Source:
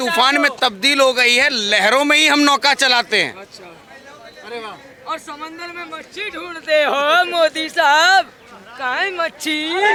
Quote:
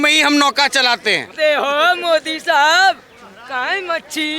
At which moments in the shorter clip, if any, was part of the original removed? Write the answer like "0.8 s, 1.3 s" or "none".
1.3 s